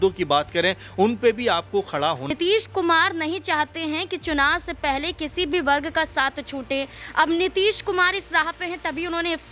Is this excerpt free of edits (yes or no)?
no